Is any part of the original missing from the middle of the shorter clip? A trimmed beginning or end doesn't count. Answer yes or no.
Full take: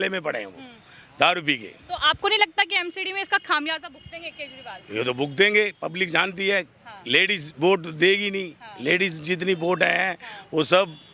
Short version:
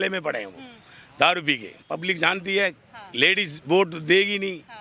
yes